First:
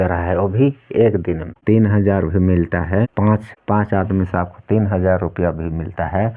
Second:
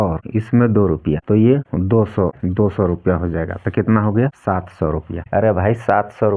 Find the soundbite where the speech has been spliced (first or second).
first